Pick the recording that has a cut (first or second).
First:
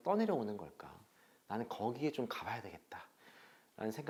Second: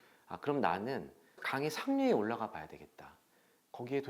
second